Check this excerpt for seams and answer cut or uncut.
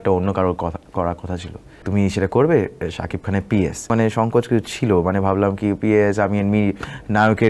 cut